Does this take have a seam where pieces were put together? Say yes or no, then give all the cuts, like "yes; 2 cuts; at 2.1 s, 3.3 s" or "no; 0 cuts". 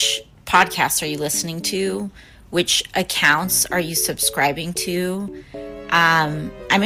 no; 0 cuts